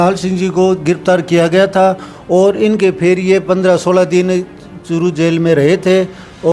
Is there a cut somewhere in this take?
no; 0 cuts

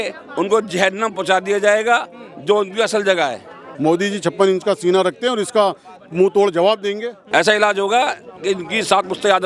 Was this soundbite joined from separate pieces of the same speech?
yes; 2 cuts; at 3.6 s, 7.1 s

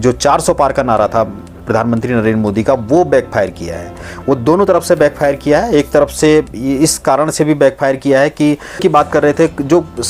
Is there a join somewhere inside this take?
yes; 1 cut; at 8.8 s

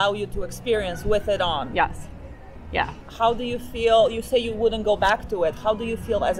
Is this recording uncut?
yes; 0 cuts

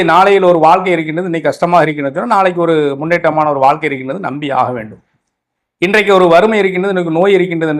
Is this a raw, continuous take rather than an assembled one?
yes; 0 cuts

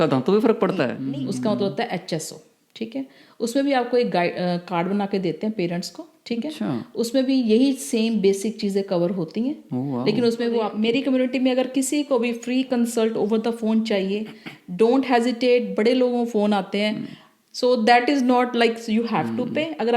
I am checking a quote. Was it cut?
yes; 2 cuts; at 0.9 s, 10.7 s

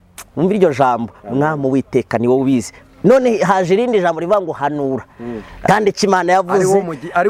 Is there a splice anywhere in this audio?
yes; 1 cut; at 5.6 s

